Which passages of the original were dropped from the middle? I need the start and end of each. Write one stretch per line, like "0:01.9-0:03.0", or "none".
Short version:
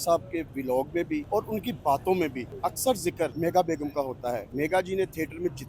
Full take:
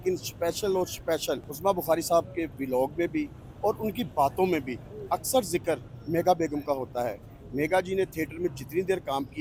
0:03.3-0:03.6
0:04.8-0:04.9
0:05.8-0:06.1
0:07.2-0:07.5